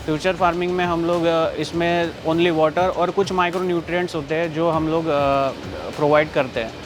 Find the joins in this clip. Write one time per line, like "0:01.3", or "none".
none

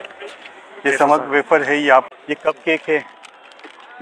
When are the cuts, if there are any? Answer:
0:02.1

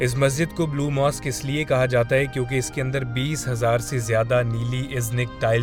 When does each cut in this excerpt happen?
none

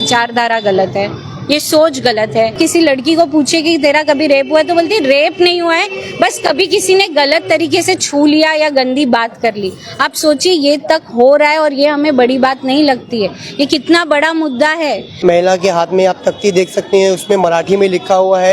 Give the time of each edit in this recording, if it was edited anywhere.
0:02.5
0:15.1

